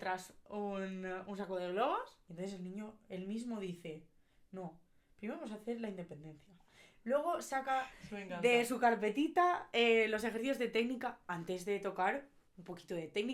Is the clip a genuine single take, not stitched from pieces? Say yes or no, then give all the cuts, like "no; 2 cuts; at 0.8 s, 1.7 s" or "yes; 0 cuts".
no; 1 cut; at 2.2 s